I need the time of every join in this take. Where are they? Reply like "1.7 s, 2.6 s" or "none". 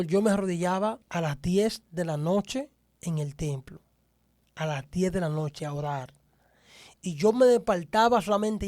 1.0 s